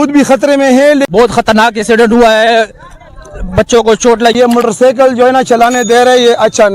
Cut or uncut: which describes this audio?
cut